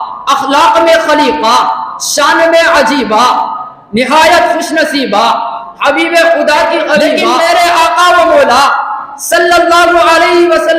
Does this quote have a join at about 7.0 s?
yes; 1 cut; at 7.0 s

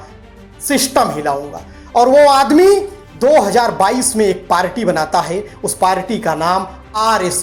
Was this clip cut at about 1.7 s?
no; 0 cuts

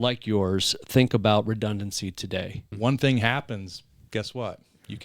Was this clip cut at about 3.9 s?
no; 1 cut; at 2.6 s

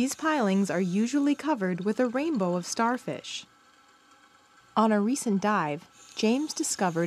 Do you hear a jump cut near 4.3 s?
no; 1 cut; at 2.1 s

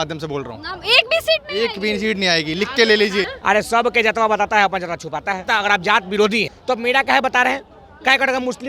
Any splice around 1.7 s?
no; 3 cuts; at 3.3 s, 5.4 s, 6.5 s

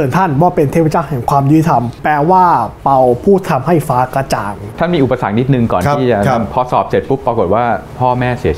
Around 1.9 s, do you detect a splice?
yes; 2 cuts; at 1.9 s, 4.7 s

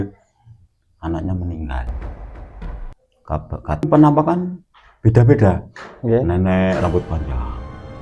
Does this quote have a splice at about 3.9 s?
yes; 1 cut; at 3.9 s

